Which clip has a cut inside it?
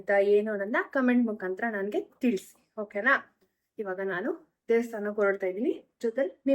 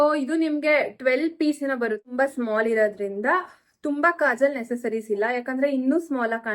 second; 1 cut; at 2.0 s

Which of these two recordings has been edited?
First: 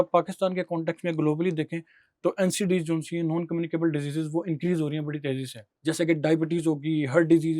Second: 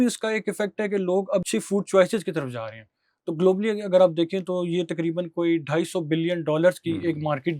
second; 1 cut; at 1.5 s

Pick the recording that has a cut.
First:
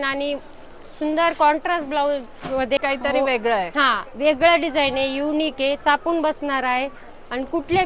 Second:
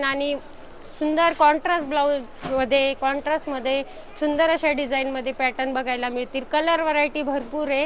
first; 1 cut; at 2.8 s

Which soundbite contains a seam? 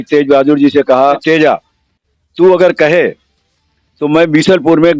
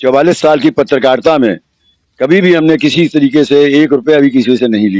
first; 1 cut; at 1.2 s

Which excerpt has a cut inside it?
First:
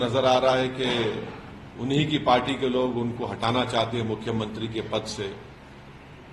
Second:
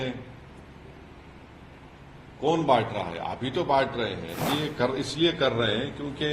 second; 1 cut; at 4.5 s

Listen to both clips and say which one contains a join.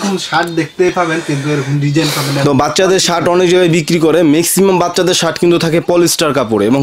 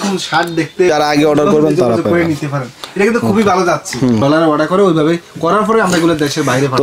second; 2 cuts; at 0.9 s, 4.2 s

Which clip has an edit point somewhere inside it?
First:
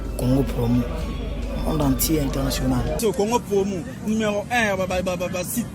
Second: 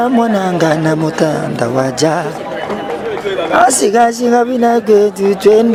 first; 1 cut; at 3.0 s

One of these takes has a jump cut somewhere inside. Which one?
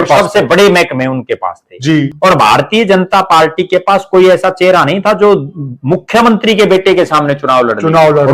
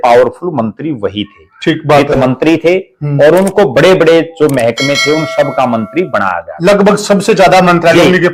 first; 1 cut; at 2.1 s

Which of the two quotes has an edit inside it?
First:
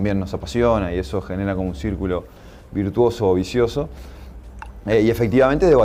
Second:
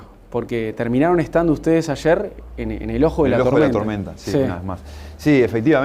second; 1 cut; at 3.4 s

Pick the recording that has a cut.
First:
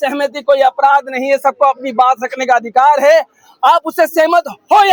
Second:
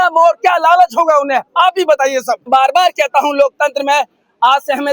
second; 1 cut; at 2.5 s

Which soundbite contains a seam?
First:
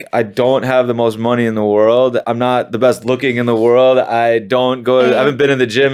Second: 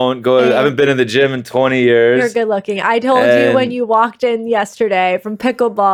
first; 1 cut; at 2.2 s

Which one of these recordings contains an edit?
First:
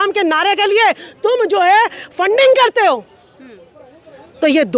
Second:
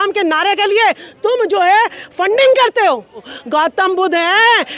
second; 1 cut; at 3.4 s

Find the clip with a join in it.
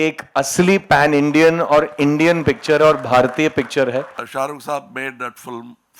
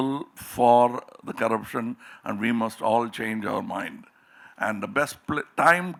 first; 1 cut; at 4.2 s

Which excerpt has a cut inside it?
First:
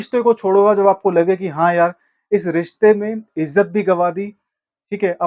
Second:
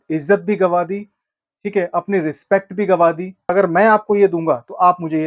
second; 1 cut; at 3.5 s

